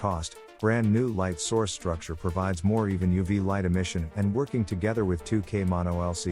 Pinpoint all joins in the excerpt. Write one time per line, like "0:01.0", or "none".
none